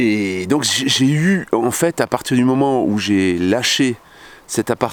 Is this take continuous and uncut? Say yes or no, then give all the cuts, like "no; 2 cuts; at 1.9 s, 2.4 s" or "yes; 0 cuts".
yes; 0 cuts